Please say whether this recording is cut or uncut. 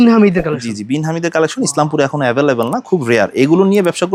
uncut